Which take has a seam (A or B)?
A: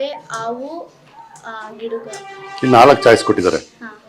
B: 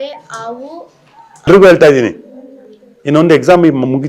B